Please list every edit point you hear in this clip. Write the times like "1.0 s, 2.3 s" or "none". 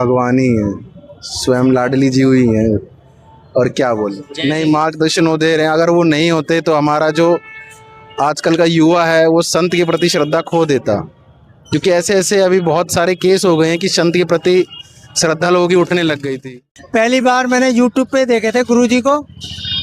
4.3 s, 16.3 s